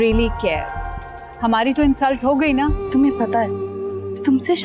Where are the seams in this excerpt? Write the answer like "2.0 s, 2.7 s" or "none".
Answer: 2.8 s